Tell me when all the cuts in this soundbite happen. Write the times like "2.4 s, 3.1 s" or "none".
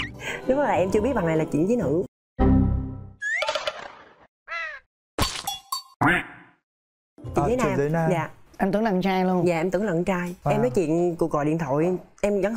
none